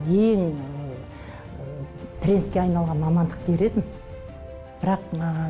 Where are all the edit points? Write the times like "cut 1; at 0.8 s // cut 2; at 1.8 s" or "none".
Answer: cut 1; at 4.4 s